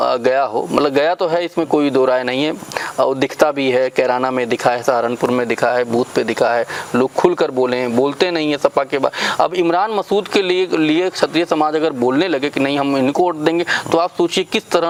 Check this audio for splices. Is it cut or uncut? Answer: uncut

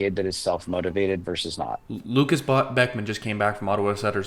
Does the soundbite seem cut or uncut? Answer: cut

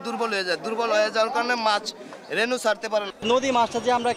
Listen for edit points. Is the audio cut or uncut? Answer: cut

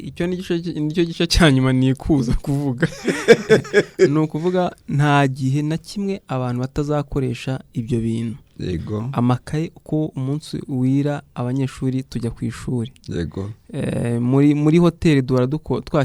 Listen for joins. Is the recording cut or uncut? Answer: uncut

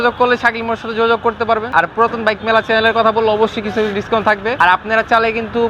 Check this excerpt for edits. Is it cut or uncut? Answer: cut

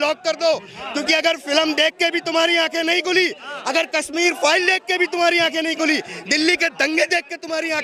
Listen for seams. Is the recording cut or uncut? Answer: uncut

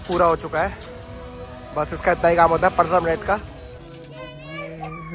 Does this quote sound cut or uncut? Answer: cut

